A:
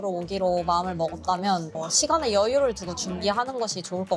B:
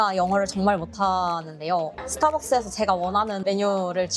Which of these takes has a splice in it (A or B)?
B